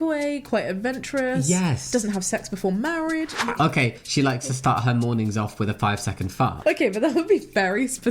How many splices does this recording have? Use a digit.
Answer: 1